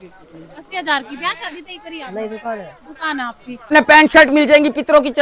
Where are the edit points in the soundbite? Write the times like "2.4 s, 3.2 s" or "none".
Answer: 3.7 s